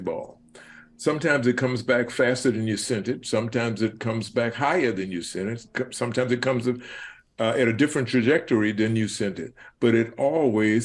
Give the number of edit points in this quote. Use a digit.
0